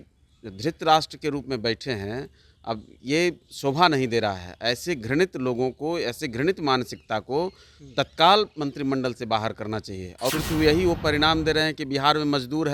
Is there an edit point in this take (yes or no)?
yes